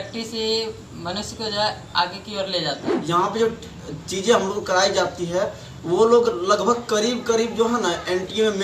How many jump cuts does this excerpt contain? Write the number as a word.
one